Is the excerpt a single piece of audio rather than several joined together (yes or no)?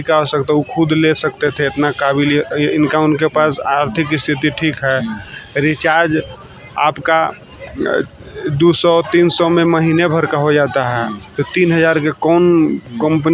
yes